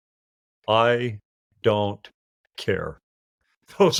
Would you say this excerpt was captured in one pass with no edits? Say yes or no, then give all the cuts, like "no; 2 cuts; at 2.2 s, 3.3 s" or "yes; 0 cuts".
yes; 0 cuts